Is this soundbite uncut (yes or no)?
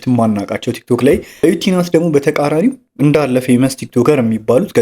no